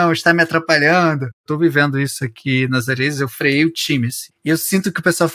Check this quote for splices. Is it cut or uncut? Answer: cut